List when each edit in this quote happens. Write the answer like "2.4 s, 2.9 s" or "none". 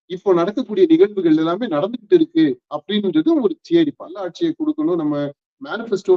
4.3 s